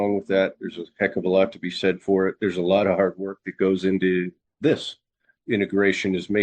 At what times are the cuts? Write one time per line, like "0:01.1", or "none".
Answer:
0:04.4
0:05.3